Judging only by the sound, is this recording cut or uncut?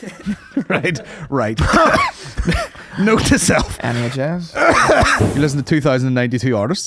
cut